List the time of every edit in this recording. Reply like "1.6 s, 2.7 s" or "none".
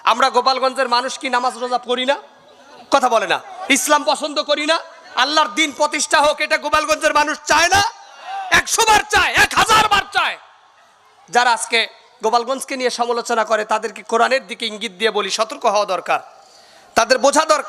none

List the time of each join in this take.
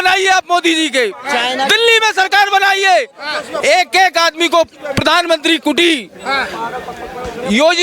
none

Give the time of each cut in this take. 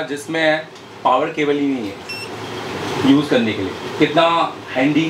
none

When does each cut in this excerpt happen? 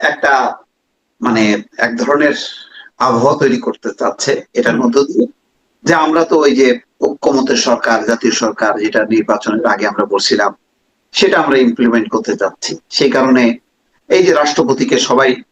none

